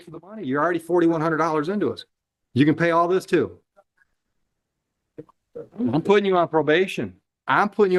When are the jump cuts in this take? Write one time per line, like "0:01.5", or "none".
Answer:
none